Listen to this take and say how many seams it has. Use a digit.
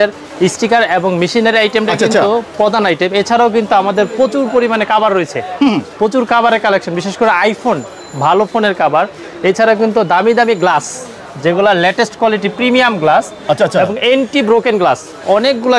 0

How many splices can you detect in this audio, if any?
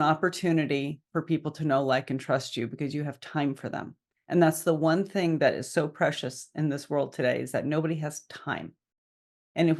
0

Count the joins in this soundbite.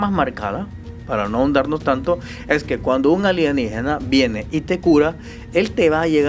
0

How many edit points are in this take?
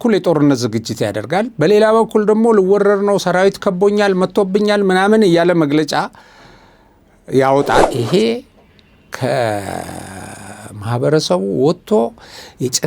1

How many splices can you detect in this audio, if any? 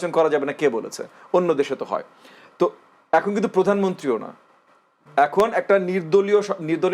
0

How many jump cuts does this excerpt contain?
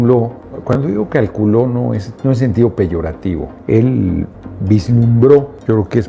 0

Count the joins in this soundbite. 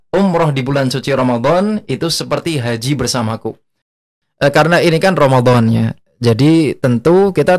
1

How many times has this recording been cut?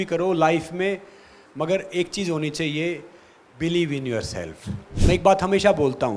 1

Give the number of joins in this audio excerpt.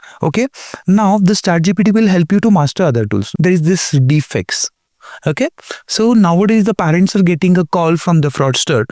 1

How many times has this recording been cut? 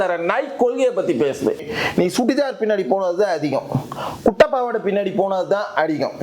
1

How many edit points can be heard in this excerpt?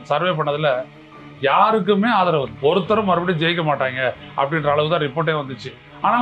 1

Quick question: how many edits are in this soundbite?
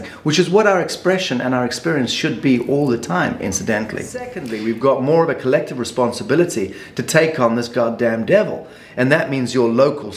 1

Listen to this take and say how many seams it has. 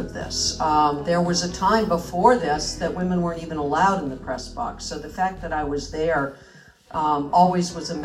0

